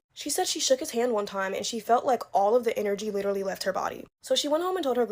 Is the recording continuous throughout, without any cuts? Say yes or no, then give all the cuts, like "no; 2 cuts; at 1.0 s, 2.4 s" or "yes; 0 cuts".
yes; 0 cuts